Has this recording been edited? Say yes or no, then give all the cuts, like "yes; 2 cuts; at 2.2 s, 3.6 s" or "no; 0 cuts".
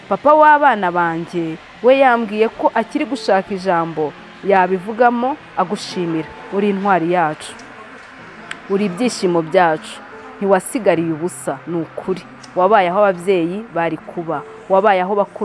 no; 0 cuts